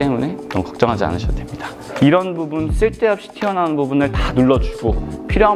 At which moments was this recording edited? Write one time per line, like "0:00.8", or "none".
0:01.8